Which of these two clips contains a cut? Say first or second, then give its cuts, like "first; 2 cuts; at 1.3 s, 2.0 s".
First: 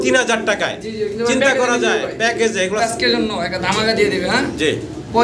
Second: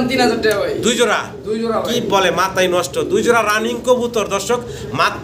first; 1 cut; at 2.8 s